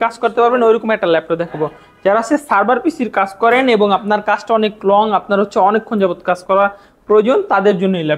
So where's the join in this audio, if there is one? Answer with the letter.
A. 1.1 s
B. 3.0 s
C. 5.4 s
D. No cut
D